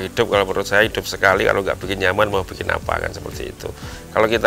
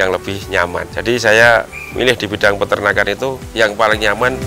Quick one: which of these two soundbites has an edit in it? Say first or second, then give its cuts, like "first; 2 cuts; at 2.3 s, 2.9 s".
second; 2 cuts; at 0.9 s, 3.4 s